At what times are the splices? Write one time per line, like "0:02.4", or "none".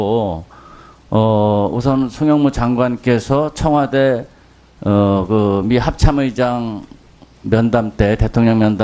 0:04.3